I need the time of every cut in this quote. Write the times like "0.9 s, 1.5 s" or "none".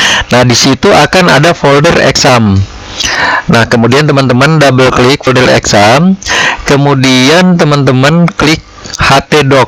none